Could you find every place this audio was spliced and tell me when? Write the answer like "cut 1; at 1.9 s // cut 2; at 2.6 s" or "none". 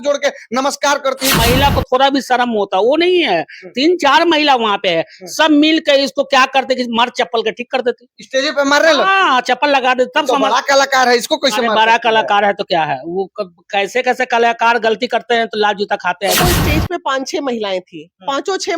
cut 1; at 1.3 s // cut 2; at 16.4 s